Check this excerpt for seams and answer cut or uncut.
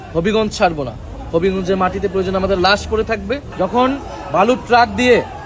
cut